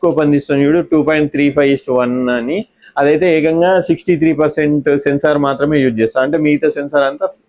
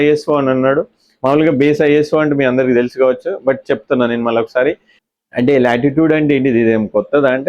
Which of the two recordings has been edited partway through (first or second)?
second